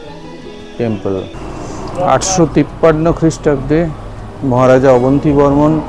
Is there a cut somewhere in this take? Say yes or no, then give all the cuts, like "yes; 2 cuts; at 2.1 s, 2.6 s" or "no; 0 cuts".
yes; 1 cut; at 1.4 s